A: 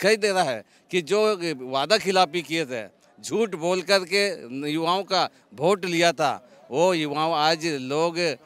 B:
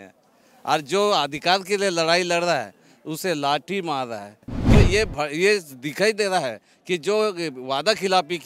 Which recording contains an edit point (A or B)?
B